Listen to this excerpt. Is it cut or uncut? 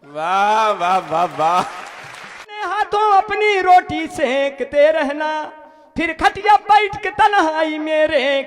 cut